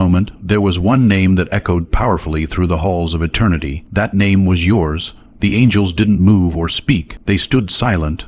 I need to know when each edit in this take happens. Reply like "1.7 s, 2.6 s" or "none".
3.8 s, 7.1 s